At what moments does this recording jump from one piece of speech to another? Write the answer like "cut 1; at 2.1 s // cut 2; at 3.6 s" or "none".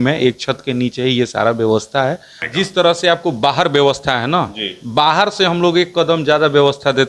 cut 1; at 2.4 s